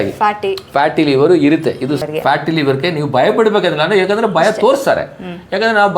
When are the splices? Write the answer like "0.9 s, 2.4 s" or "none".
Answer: 2.0 s